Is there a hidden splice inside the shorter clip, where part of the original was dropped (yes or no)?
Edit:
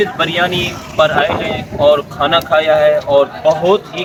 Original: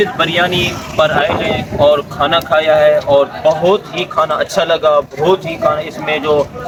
no